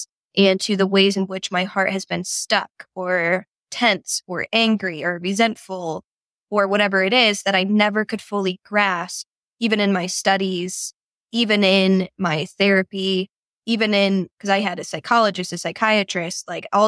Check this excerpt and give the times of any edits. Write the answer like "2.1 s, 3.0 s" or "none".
none